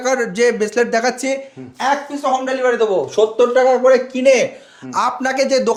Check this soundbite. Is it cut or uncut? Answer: uncut